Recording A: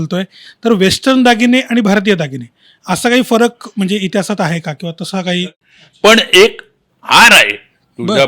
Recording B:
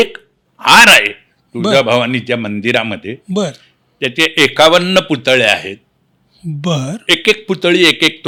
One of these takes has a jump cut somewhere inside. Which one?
A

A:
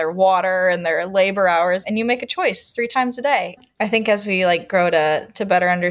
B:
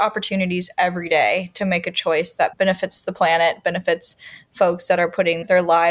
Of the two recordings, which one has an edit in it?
A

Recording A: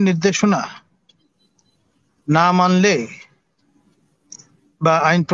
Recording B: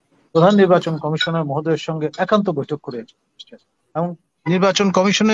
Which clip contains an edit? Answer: B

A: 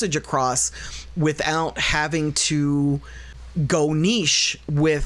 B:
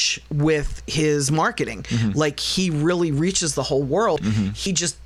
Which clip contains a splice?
A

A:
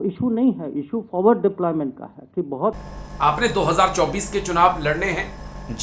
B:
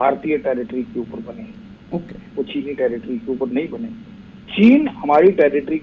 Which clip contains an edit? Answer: A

